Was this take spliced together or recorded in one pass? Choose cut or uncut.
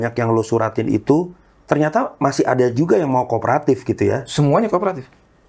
uncut